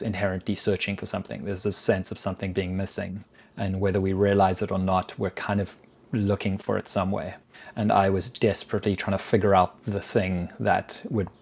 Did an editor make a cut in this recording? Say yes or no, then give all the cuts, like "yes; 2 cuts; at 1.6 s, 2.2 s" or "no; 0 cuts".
no; 0 cuts